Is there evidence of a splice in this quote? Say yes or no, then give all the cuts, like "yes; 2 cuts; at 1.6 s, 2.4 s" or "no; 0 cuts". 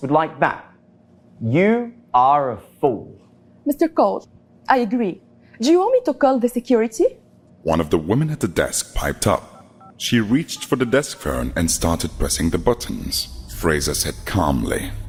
no; 0 cuts